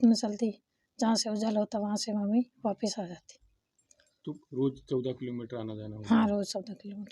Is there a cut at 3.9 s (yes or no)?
no